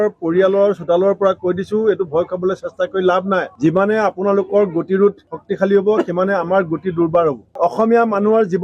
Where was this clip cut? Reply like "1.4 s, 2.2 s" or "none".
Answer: 7.5 s